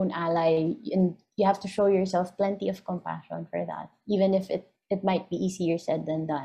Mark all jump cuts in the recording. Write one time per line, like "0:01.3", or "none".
none